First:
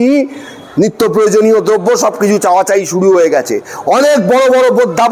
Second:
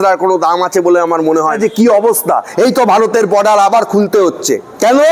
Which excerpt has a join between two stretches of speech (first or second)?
second